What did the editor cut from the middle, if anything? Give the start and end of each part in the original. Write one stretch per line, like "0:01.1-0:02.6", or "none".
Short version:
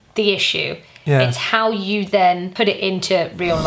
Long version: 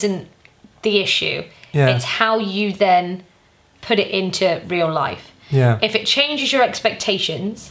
0:03.1-0:03.8